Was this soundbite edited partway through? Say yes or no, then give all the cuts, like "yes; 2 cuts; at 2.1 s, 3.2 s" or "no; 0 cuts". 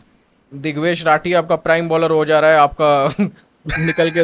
no; 0 cuts